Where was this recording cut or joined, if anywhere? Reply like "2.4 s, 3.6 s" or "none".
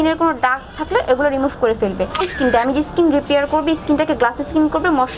2.2 s